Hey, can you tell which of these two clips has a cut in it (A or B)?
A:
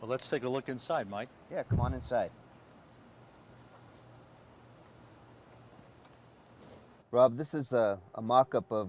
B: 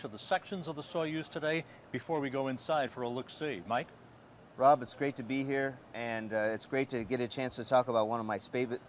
A